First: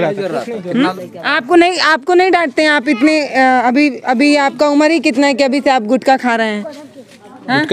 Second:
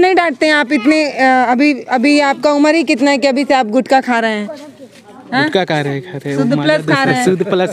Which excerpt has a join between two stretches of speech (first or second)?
first